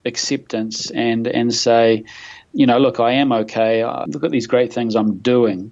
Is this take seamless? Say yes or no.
no